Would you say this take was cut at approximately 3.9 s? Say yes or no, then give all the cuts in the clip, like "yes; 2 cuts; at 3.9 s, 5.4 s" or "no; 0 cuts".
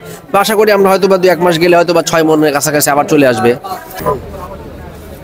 yes; 1 cut; at 3.9 s